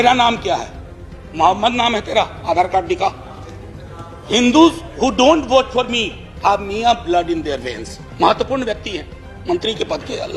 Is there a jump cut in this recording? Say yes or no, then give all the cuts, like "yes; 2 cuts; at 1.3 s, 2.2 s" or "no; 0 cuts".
no; 0 cuts